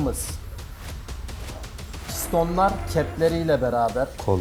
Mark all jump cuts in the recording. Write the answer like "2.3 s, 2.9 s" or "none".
none